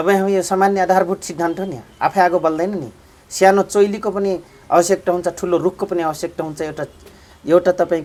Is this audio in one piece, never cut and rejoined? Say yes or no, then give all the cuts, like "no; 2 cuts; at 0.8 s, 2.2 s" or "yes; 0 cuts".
yes; 0 cuts